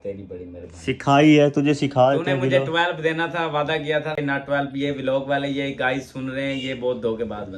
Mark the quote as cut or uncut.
uncut